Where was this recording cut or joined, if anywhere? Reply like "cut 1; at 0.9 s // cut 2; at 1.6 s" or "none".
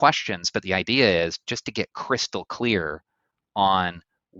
none